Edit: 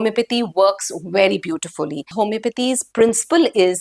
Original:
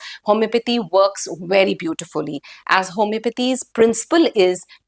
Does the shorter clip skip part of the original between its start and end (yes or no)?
yes